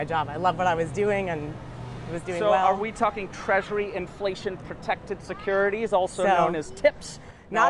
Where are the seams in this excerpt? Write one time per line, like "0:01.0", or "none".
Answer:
none